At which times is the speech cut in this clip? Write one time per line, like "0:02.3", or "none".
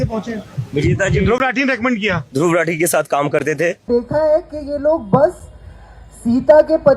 0:03.8